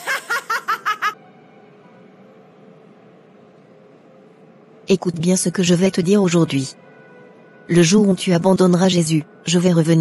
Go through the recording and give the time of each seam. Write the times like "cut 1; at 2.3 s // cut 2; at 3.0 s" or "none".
cut 1; at 1.1 s